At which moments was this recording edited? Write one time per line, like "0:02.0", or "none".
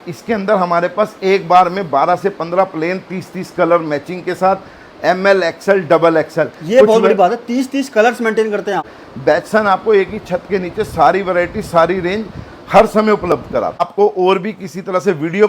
0:09.0
0:13.8